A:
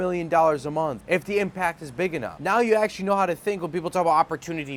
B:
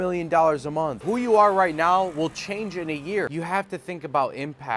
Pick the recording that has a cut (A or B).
B